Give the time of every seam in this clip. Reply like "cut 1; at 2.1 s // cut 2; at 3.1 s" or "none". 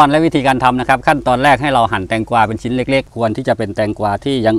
cut 1; at 3.1 s

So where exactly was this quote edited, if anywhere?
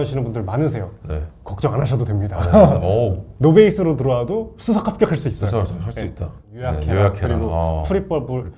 cut 1; at 6.5 s

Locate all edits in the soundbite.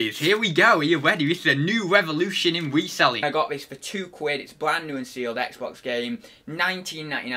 cut 1; at 3.2 s

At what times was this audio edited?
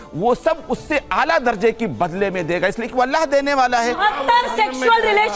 cut 1; at 4.0 s

